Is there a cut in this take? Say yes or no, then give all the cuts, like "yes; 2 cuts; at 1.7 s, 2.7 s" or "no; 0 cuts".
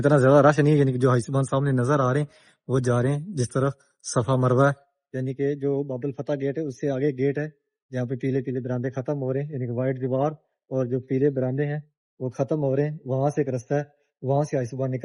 no; 0 cuts